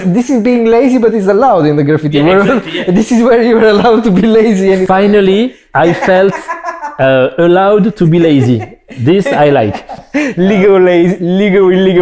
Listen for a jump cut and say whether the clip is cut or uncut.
uncut